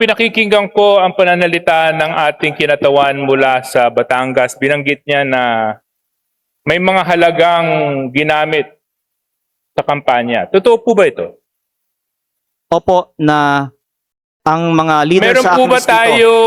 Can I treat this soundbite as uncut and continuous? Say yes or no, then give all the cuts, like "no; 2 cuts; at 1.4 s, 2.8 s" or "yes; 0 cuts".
yes; 0 cuts